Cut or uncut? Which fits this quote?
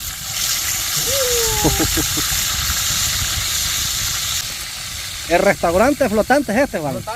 cut